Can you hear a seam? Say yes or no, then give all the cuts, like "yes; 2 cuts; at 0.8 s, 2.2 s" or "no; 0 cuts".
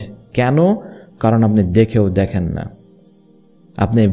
no; 0 cuts